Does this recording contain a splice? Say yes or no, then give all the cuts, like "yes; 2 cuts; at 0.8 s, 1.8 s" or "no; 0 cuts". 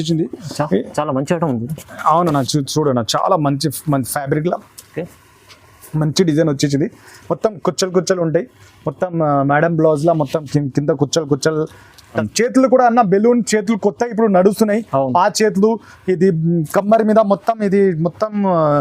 yes; 1 cut; at 12.2 s